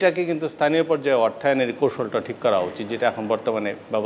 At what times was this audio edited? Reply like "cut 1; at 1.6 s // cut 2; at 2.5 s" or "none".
none